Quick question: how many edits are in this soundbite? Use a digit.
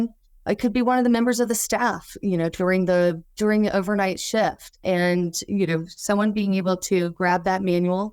1